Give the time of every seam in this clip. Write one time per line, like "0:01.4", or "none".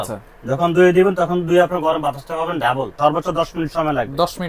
0:02.9